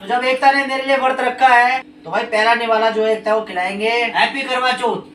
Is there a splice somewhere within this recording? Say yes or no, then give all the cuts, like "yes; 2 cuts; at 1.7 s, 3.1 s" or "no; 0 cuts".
yes; 2 cuts; at 1.9 s, 4.1 s